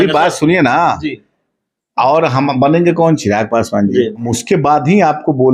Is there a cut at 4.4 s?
yes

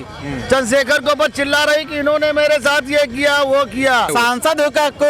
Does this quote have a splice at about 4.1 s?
yes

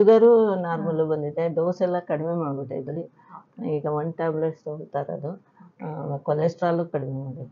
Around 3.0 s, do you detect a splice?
no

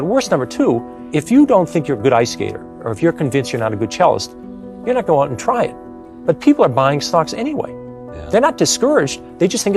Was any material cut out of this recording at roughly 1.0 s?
yes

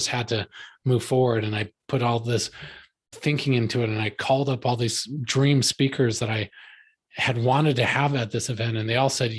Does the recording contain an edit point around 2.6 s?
no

